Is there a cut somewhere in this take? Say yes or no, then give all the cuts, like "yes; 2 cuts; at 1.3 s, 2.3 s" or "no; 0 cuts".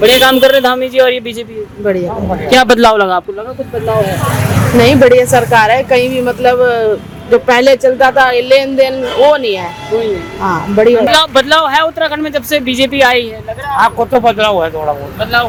no; 0 cuts